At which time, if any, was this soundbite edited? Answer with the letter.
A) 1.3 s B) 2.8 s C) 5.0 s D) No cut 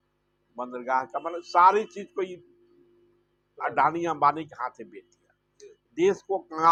D